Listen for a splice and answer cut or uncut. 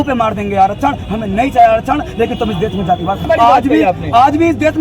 cut